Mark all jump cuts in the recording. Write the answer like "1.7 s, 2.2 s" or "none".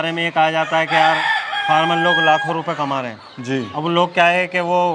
none